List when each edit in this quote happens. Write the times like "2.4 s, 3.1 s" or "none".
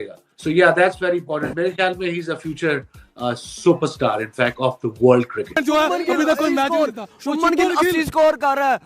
5.6 s